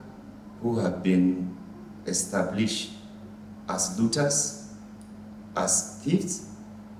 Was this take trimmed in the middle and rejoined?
no; 0 cuts

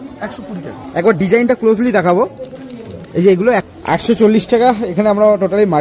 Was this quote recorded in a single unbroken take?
no; 1 cut; at 3.7 s

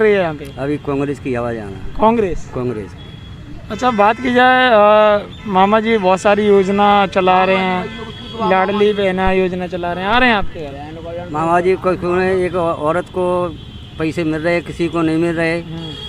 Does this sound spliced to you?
no; 0 cuts

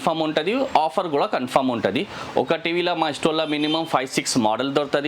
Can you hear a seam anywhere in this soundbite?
no; 0 cuts

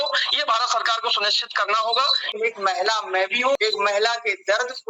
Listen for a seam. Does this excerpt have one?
yes; 2 cuts; at 2.2 s, 3.6 s

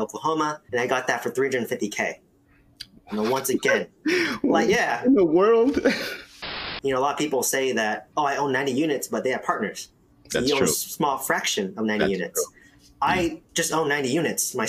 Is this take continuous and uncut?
no; 1 cut; at 6.6 s

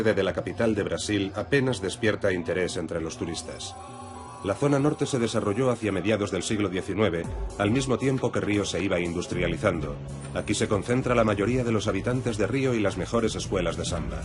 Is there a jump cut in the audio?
yes; 1 cut; at 0.9 s

